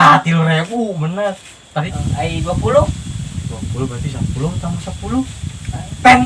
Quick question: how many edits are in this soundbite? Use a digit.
1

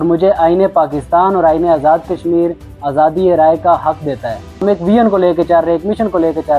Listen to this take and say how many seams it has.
1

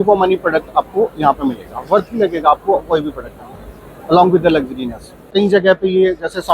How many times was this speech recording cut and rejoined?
1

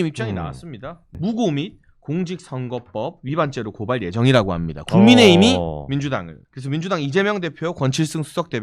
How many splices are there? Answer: 2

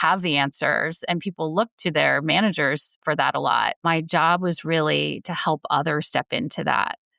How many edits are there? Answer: 1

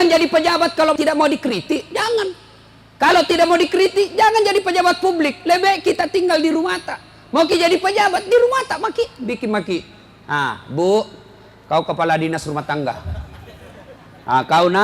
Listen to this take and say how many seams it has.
1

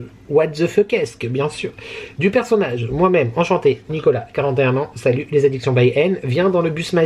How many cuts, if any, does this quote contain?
0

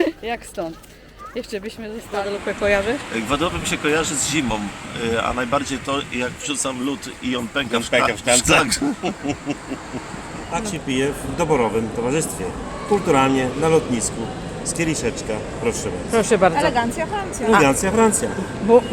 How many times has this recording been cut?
2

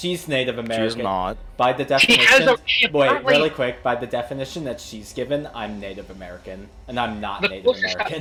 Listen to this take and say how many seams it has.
0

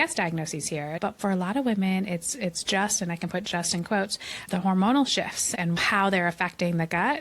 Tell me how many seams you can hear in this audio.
3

